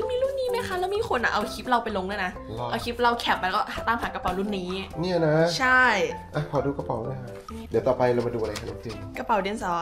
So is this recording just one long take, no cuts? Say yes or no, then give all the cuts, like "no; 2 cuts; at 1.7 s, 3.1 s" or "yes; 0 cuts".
no; 1 cut; at 7.6 s